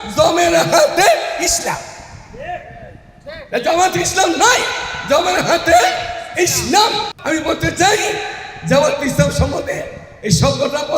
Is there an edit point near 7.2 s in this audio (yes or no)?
yes